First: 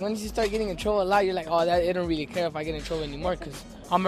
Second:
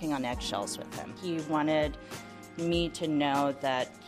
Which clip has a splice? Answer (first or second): second